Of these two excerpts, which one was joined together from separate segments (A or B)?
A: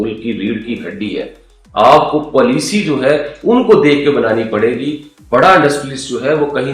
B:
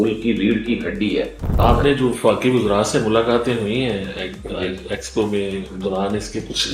B